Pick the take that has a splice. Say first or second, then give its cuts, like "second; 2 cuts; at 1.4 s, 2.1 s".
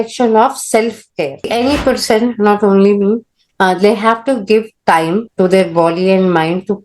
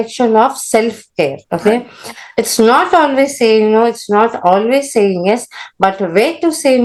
first; 1 cut; at 1.5 s